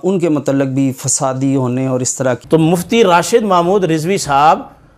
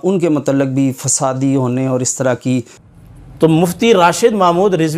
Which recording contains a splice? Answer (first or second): first